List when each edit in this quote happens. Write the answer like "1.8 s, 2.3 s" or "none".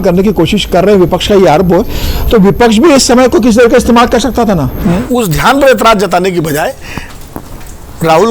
4.7 s